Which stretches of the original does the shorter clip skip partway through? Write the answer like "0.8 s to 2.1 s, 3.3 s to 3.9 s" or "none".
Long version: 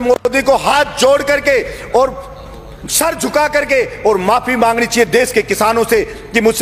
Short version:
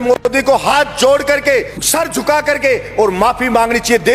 1.8 s to 2.8 s